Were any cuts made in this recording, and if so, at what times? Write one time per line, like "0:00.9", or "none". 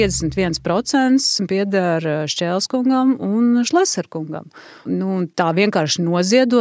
0:01.4
0:04.9